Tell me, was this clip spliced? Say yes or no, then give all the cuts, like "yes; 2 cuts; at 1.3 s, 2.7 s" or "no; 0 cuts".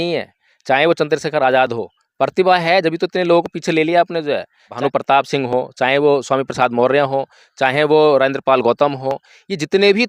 yes; 1 cut; at 4.7 s